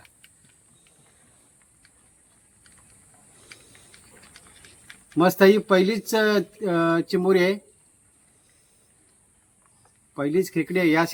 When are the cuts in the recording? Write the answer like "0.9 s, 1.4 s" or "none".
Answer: none